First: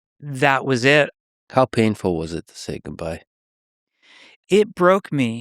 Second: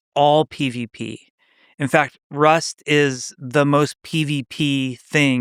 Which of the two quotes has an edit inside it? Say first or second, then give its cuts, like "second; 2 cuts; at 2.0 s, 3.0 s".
first; 2 cuts; at 1.1 s, 4.4 s